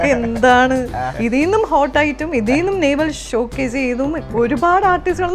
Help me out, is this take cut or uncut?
cut